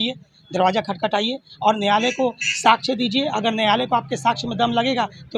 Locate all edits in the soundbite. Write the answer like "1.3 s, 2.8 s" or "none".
none